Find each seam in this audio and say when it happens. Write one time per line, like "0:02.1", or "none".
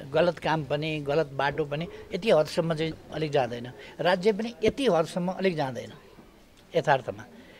none